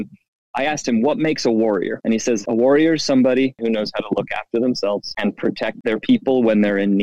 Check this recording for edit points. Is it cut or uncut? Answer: cut